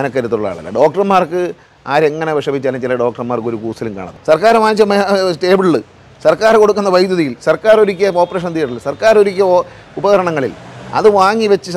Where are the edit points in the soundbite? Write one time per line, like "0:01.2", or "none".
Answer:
0:04.1